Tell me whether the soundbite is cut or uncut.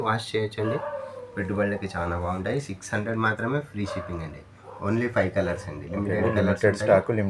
uncut